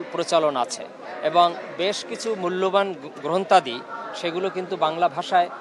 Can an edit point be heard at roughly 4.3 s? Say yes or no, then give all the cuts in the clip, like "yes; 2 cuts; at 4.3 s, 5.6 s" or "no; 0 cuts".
no; 0 cuts